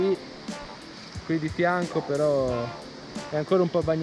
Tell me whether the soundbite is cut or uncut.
uncut